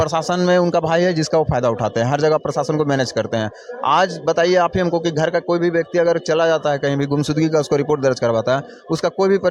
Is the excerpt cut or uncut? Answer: uncut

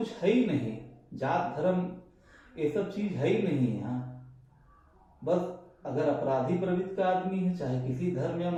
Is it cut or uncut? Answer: uncut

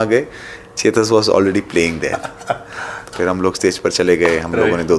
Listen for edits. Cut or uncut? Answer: cut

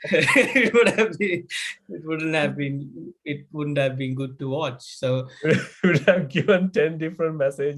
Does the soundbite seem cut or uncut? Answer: uncut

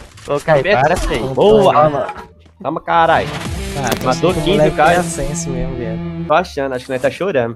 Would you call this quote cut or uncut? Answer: uncut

